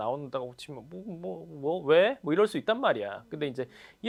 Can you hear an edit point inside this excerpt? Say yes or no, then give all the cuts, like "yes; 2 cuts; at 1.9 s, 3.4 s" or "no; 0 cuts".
no; 0 cuts